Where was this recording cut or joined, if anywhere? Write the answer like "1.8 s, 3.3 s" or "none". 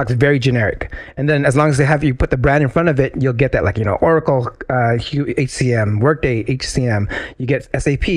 none